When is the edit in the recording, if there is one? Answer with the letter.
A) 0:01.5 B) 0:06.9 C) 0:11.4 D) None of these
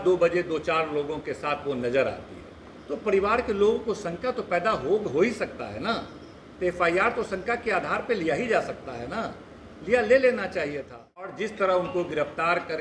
C